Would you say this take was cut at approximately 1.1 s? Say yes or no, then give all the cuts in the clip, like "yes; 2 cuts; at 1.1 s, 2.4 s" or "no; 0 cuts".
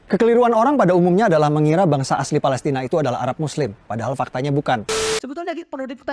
no; 1 cut; at 5.0 s